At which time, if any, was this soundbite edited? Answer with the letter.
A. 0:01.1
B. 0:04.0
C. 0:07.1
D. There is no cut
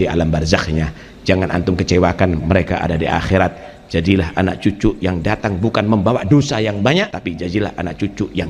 C